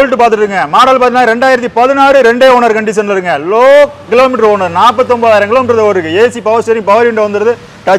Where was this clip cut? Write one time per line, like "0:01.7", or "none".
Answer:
none